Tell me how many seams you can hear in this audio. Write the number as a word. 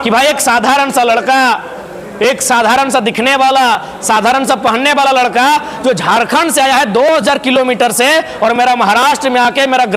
zero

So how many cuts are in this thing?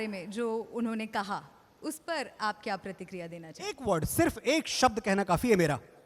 zero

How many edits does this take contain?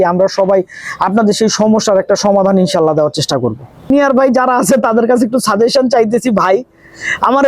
one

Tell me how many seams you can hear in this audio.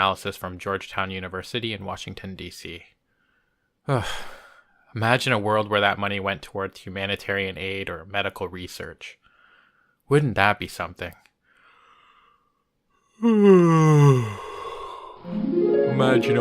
one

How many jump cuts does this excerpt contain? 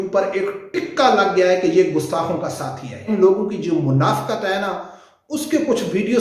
one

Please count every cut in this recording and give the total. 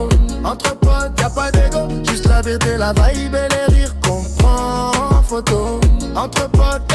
zero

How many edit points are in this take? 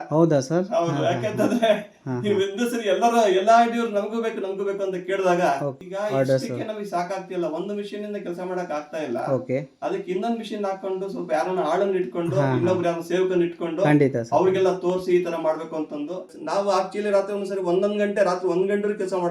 two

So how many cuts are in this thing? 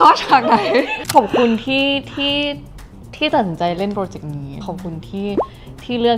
two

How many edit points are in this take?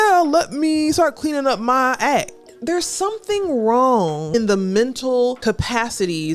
three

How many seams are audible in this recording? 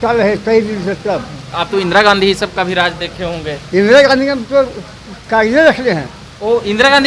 zero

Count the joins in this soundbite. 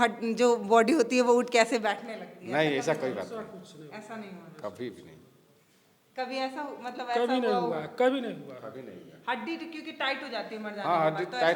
zero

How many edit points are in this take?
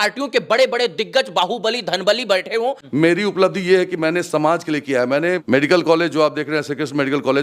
two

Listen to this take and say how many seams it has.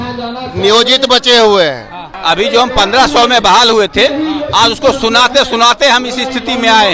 one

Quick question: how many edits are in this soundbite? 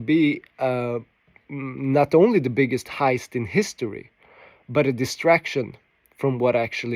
zero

